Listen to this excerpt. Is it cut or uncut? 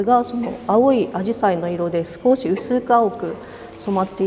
uncut